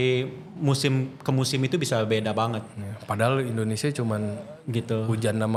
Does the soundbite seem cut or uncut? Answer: uncut